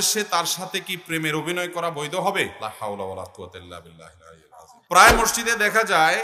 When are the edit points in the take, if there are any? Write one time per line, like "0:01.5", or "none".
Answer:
0:02.6
0:04.8